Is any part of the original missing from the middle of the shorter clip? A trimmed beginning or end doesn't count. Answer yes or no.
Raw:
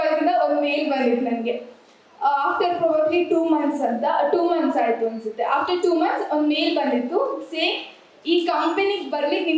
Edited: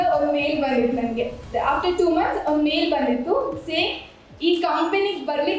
yes